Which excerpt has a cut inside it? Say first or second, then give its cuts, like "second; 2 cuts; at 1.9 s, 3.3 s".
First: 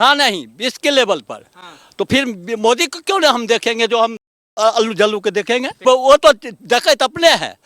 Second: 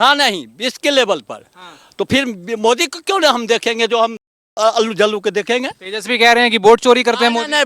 first; 1 cut; at 5.7 s